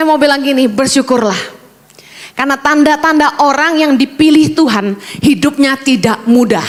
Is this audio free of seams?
yes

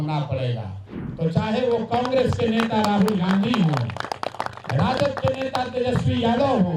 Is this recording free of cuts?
no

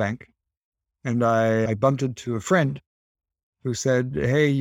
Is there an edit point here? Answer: no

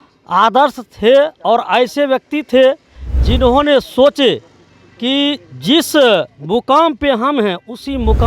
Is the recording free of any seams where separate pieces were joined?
yes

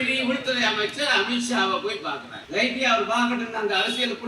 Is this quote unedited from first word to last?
no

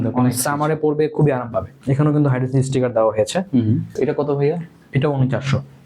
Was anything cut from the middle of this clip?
yes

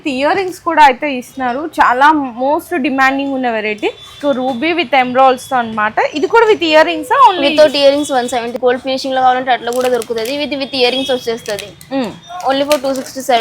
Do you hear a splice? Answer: yes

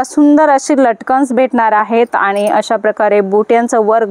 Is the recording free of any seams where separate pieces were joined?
yes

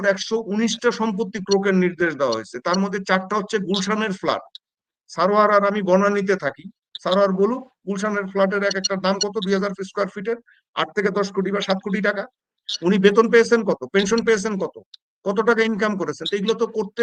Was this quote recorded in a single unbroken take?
yes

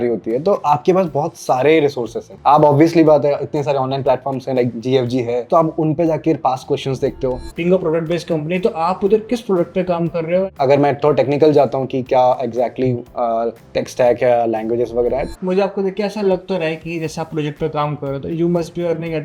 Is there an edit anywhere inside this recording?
yes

